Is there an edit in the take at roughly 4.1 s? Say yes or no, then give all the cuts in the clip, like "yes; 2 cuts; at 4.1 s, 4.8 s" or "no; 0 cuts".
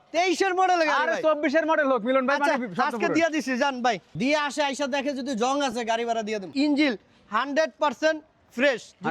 yes; 2 cuts; at 4.1 s, 6.5 s